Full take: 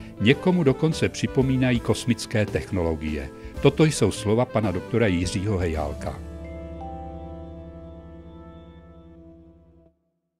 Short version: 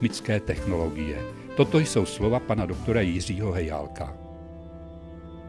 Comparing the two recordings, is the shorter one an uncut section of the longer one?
no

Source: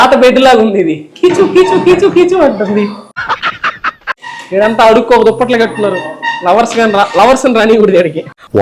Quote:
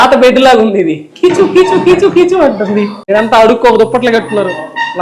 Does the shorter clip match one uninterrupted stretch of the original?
no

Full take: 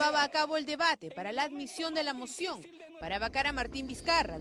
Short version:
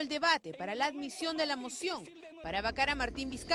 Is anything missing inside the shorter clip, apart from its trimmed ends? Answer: no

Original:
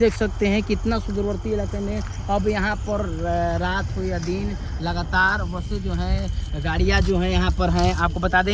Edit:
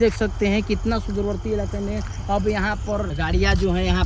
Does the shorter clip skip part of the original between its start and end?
yes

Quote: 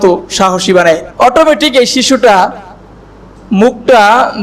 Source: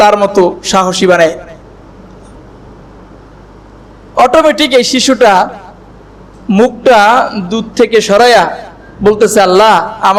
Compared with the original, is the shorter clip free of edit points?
no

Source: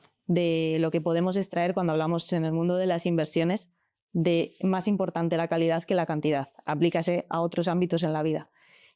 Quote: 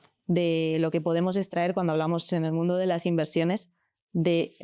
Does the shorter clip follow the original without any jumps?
yes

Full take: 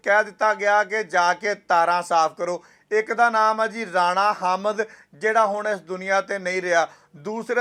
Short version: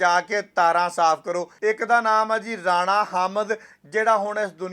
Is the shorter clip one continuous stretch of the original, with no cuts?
no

